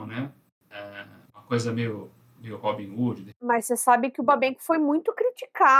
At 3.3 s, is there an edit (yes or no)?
yes